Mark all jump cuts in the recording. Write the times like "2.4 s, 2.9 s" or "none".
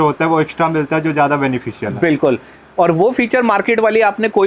none